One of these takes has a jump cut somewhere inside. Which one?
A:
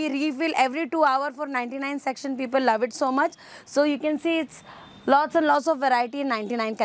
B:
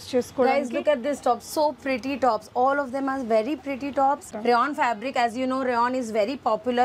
B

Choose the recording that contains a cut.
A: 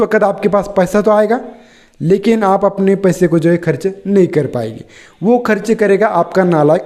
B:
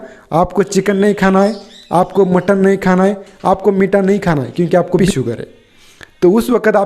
B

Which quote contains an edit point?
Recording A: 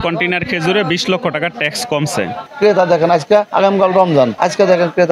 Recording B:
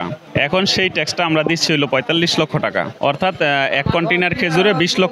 A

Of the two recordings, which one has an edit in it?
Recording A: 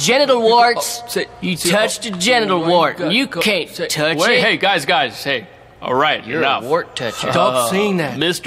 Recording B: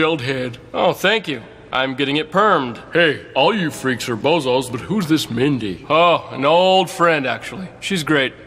A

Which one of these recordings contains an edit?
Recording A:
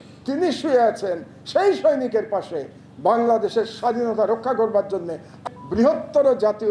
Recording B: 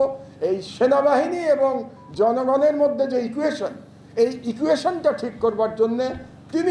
A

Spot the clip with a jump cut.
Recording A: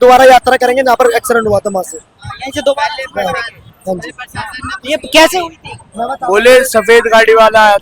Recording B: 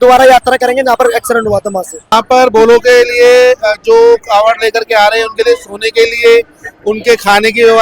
B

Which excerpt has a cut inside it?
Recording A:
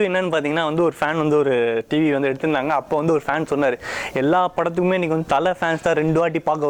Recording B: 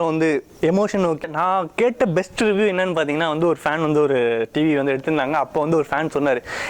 B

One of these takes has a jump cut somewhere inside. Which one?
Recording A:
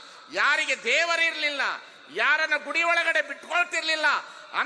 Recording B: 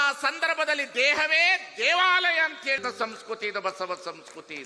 B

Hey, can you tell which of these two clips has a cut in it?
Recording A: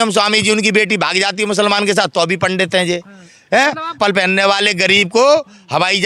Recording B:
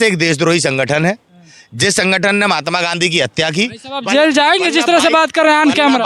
A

